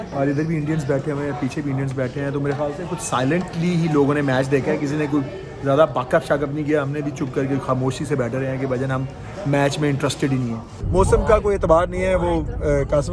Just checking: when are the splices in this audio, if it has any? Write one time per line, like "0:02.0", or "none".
0:10.7